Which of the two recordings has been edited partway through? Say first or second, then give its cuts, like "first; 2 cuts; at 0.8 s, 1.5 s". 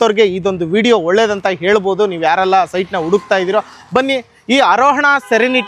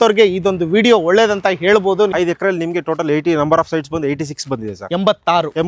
second; 1 cut; at 2.1 s